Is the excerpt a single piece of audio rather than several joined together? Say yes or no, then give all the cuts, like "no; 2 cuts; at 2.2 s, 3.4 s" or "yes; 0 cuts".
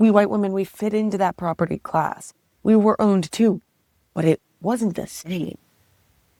yes; 0 cuts